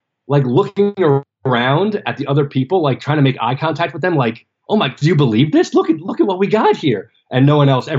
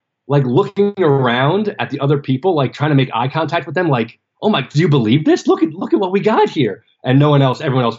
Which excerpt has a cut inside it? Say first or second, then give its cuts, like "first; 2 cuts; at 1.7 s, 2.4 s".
second; 1 cut; at 1.2 s